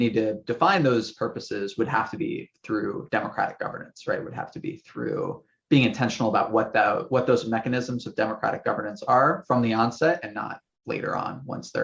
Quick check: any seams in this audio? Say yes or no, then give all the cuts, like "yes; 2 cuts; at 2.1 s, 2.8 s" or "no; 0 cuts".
no; 0 cuts